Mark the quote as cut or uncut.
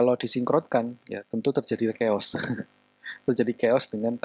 uncut